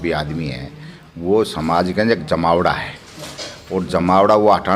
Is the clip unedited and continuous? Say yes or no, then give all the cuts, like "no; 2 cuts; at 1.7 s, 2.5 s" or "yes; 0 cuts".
yes; 0 cuts